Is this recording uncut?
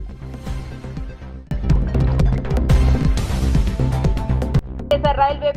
yes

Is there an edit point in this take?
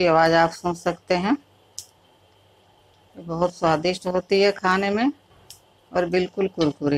no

